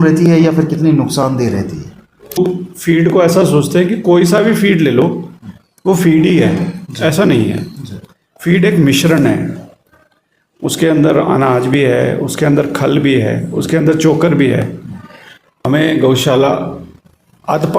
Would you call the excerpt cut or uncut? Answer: cut